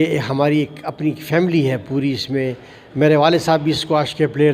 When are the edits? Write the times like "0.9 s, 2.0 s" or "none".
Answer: none